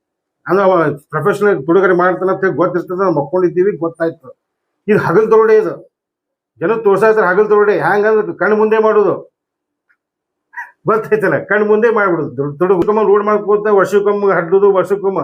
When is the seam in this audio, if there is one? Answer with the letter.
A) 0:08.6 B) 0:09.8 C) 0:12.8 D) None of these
C